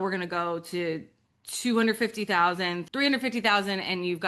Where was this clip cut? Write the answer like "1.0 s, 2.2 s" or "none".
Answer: 2.8 s